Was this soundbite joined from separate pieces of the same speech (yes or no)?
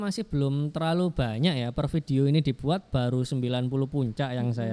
no